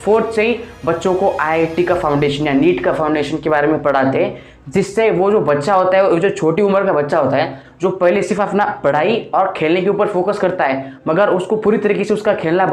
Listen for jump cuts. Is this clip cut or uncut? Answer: uncut